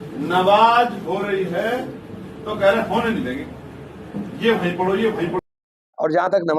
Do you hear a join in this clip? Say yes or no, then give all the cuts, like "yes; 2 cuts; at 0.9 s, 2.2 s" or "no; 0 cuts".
yes; 1 cut; at 5.4 s